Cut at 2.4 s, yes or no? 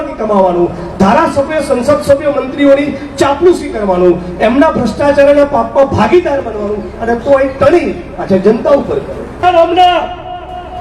no